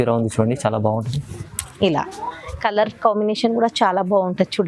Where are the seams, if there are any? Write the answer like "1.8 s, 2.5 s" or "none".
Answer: none